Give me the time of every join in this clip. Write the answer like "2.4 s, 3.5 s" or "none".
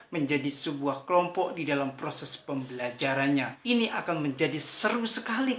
3.5 s

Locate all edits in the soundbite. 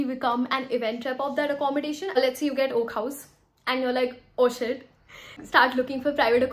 2.1 s, 5.4 s

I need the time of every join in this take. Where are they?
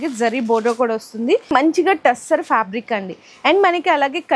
1.5 s

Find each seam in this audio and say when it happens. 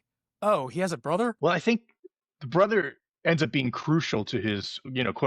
1.3 s

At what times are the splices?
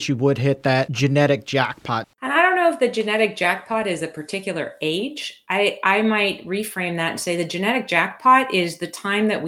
0.9 s, 2.0 s

